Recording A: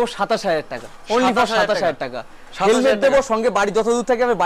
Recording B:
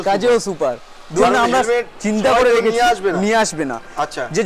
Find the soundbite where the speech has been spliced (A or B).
B